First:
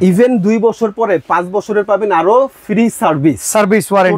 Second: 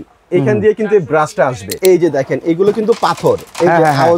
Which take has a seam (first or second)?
second